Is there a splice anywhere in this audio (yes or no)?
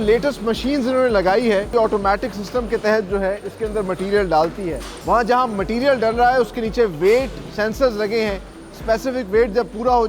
yes